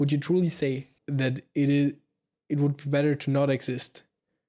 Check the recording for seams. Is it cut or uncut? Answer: cut